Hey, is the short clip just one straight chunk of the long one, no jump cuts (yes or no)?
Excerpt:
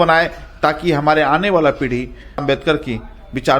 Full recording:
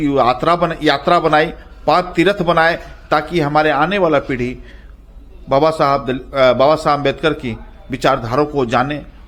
no